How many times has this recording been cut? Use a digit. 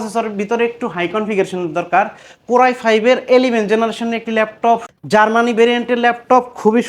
1